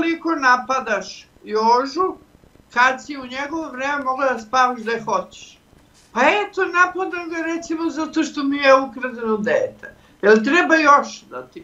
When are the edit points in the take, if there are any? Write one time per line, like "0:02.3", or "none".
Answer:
none